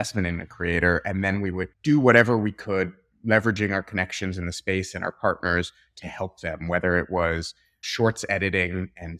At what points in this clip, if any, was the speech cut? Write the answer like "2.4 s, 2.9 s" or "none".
none